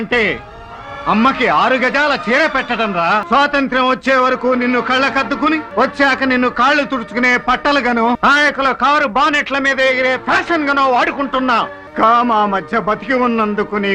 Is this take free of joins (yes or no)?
no